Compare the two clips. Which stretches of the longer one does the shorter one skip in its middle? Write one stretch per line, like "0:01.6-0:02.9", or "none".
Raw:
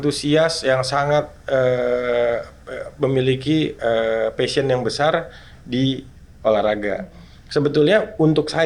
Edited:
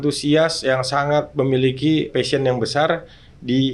0:01.3-0:02.9
0:03.7-0:04.3